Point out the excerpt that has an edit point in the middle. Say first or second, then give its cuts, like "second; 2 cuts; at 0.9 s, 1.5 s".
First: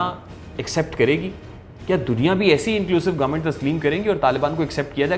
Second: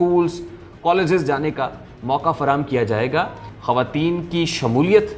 second; 1 cut; at 3.4 s